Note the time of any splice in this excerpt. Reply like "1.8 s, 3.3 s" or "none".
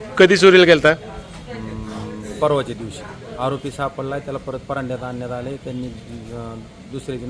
3.2 s